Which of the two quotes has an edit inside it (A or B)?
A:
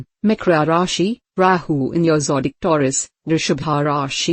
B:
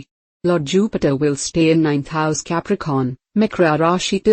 A